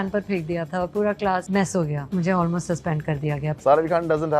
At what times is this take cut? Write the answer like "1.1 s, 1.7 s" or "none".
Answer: 1.9 s, 3.5 s